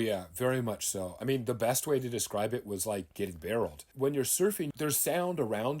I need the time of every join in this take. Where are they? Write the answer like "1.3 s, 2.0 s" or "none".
1.1 s, 3.8 s, 4.7 s